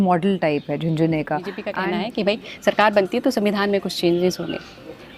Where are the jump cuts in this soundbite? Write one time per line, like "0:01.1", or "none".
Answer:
0:01.8